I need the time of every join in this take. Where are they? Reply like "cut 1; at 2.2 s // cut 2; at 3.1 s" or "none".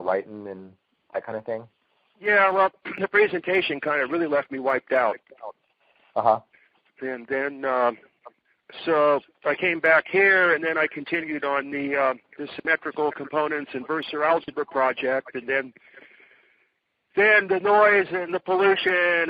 cut 1; at 13.6 s